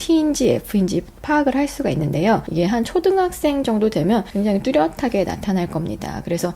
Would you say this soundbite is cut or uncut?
cut